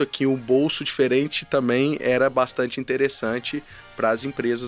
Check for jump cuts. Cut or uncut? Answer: uncut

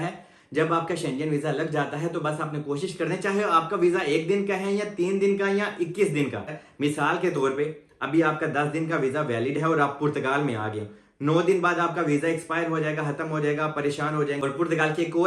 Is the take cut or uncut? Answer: cut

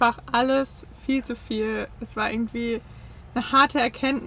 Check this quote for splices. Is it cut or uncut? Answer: uncut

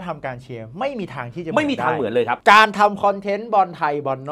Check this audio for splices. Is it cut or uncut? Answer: cut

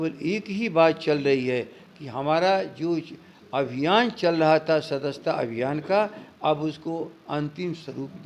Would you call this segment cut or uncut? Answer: uncut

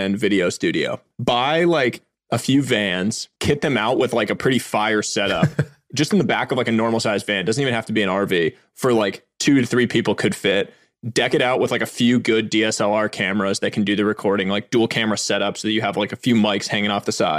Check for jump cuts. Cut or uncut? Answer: cut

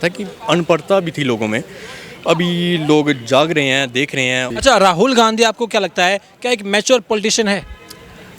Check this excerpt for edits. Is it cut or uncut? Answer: cut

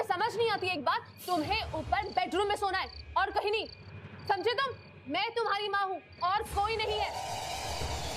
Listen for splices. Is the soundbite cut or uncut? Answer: cut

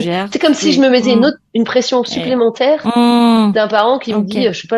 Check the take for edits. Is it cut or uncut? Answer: uncut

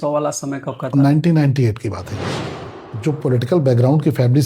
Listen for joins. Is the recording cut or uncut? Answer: cut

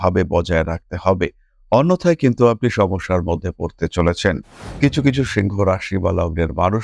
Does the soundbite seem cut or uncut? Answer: cut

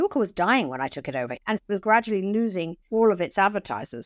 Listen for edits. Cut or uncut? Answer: cut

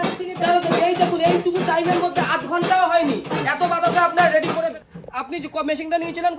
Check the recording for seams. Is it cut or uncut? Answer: cut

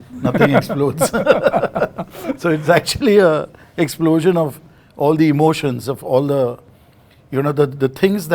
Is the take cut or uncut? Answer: uncut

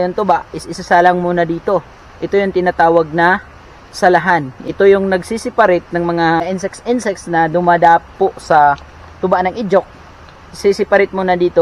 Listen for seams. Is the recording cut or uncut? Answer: cut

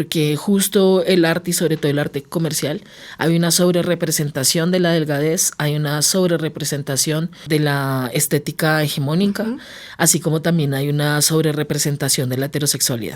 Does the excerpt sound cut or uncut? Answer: cut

